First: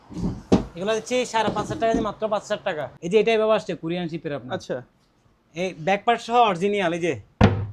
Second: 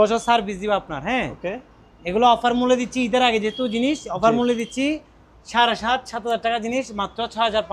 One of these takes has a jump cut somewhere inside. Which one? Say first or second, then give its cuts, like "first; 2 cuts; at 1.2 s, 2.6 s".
first; 1 cut; at 2.9 s